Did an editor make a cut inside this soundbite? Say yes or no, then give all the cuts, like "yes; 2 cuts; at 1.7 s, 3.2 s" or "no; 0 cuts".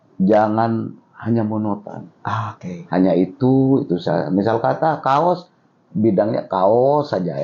no; 0 cuts